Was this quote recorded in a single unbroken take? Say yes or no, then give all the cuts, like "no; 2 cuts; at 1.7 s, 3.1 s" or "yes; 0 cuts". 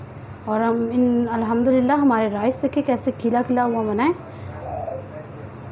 yes; 0 cuts